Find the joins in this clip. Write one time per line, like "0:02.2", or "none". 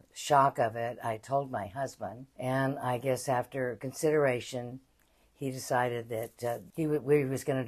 0:02.2
0:06.6